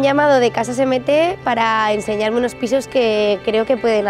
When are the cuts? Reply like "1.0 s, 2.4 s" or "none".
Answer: none